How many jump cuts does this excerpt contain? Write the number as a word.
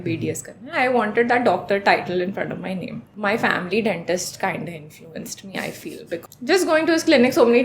two